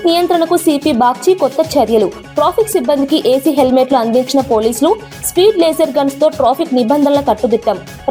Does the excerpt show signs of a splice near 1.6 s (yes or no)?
no